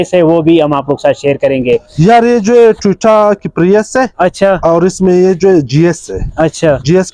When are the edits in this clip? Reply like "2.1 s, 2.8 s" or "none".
1.9 s